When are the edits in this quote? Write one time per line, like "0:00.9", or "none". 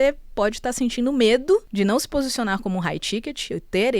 0:01.7